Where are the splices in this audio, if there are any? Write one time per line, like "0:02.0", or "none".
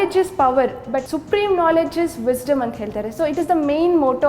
0:01.1